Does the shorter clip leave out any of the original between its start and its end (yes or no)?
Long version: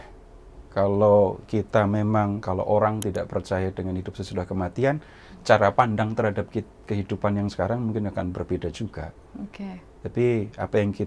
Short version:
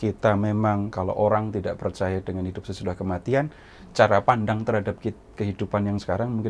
no